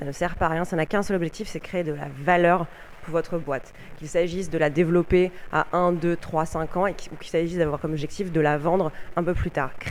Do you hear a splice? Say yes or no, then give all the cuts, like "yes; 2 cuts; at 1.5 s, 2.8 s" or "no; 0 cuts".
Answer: no; 0 cuts